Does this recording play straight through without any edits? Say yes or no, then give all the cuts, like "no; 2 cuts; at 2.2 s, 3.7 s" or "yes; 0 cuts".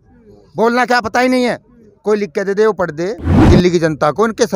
no; 1 cut; at 3.3 s